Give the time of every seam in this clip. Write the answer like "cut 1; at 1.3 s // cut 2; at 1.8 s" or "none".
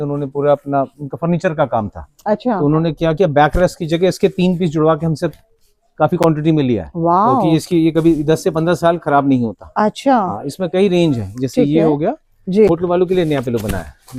none